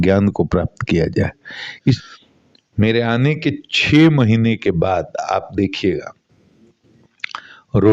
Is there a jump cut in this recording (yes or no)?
yes